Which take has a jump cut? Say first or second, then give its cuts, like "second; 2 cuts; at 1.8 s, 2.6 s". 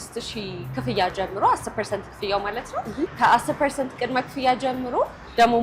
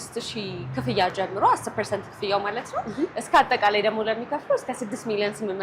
first; 1 cut; at 3.1 s